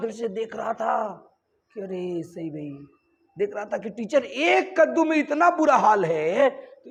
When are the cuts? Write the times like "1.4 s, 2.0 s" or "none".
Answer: none